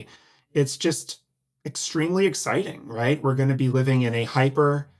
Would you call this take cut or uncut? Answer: uncut